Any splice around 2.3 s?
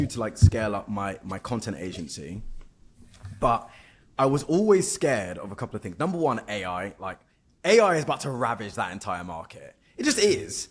no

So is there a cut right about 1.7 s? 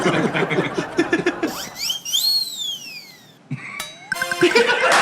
yes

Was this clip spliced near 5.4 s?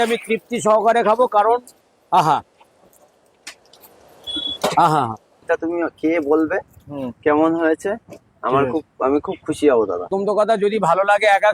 yes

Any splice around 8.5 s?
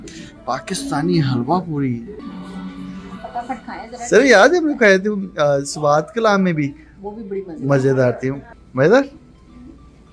yes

